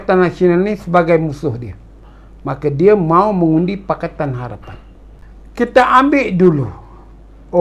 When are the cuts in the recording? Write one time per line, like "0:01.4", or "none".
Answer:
0:04.7